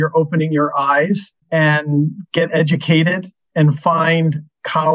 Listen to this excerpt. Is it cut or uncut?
uncut